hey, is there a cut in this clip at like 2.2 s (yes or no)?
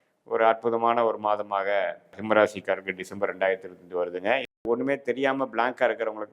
yes